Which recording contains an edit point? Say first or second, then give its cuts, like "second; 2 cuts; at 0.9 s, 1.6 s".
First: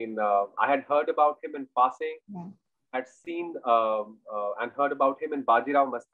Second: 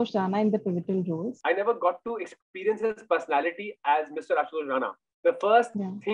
second; 1 cut; at 1.3 s